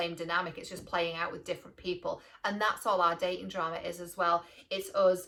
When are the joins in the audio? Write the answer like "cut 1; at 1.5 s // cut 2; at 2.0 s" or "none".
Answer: none